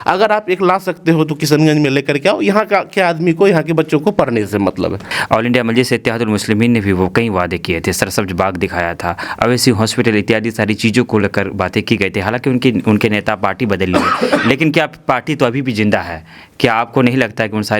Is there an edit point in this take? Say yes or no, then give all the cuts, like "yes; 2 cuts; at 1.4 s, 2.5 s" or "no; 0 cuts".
yes; 1 cut; at 5.1 s